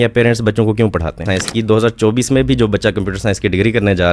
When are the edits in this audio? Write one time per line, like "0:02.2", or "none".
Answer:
0:01.2